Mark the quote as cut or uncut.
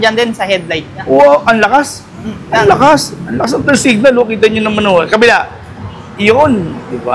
uncut